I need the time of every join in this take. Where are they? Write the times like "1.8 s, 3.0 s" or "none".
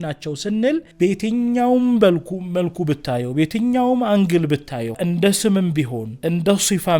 0.9 s, 5.0 s, 6.0 s